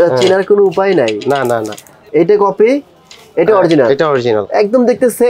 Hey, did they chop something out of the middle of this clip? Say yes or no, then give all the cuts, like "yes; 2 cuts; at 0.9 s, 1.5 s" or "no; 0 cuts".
yes; 1 cut; at 2.0 s